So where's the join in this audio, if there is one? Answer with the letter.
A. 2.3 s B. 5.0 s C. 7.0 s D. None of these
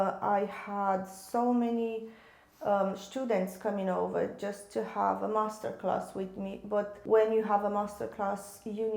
C